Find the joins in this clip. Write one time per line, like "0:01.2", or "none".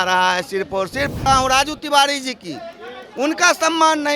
0:01.2